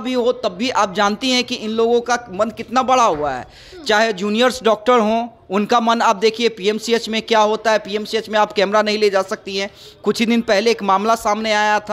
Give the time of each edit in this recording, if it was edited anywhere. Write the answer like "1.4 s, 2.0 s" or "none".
none